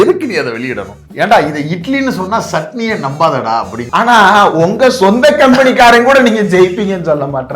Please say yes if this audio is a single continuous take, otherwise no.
no